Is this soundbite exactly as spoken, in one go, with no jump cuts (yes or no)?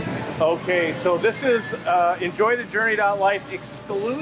yes